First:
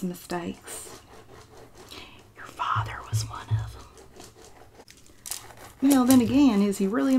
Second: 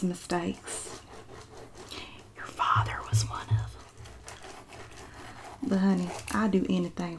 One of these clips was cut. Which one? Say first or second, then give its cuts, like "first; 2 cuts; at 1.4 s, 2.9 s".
second; 1 cut; at 3.9 s